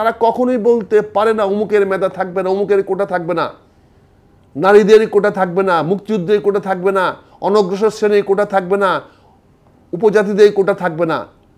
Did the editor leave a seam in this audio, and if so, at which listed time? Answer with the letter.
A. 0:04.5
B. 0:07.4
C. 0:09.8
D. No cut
D